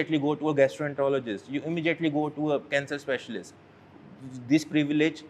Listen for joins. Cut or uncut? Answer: uncut